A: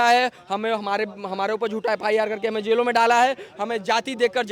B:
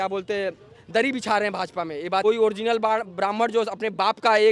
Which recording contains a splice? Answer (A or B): B